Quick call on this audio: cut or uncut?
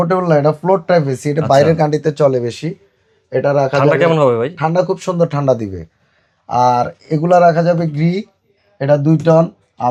uncut